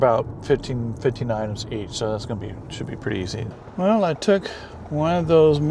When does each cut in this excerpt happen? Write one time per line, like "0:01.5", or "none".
0:03.5